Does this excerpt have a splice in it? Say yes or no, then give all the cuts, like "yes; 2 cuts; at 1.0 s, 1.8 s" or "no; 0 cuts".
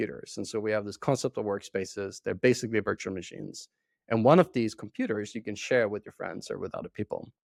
no; 0 cuts